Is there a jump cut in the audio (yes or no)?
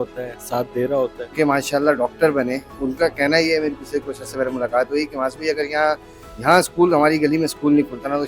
yes